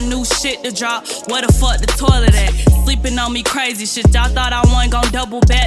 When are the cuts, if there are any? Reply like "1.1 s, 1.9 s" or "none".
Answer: none